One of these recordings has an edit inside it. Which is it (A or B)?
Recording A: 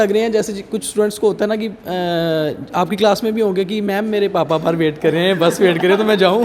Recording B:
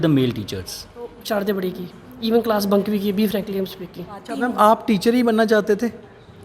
B